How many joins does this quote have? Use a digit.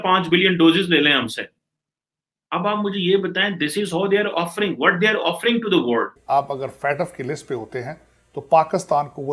1